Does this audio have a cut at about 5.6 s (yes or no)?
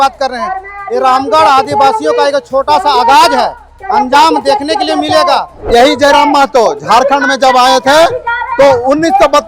yes